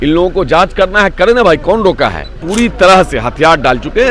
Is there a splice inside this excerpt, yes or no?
yes